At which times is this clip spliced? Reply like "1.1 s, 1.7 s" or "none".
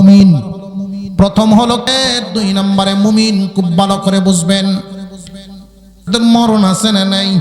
1.9 s, 6.0 s